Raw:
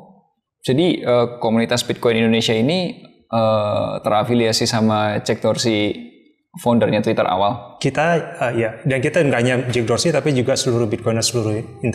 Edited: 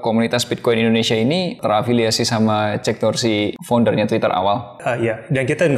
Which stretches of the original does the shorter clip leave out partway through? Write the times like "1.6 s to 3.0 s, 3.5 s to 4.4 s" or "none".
2.9 s to 4.0 s, 6.0 s to 6.5 s, 7.7 s to 8.3 s